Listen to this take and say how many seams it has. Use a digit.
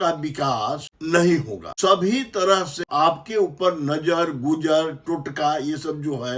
3